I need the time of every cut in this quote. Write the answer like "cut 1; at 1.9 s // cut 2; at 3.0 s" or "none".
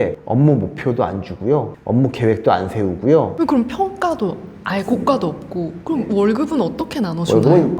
cut 1; at 3.3 s